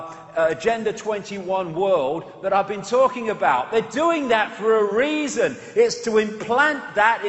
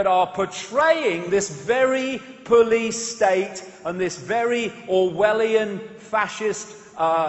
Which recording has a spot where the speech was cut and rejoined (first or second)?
first